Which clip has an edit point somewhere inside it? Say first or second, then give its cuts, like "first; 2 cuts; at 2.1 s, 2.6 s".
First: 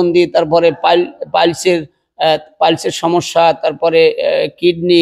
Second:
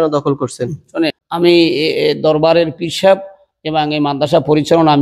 second; 1 cut; at 1.2 s